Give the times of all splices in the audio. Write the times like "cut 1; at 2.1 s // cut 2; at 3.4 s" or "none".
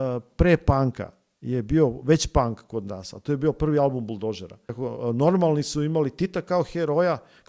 cut 1; at 4.8 s